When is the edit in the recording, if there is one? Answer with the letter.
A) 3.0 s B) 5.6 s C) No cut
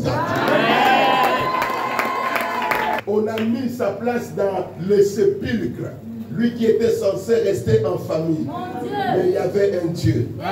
A